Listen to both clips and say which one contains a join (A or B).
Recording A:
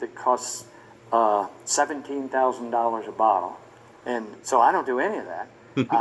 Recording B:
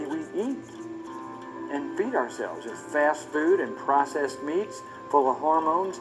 A